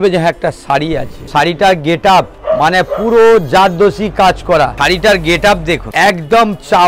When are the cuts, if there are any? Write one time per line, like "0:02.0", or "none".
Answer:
0:01.2
0:02.4
0:04.8
0:05.9